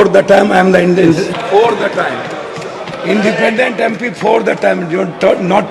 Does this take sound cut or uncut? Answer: cut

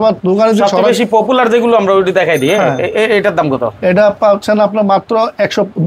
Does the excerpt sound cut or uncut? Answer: uncut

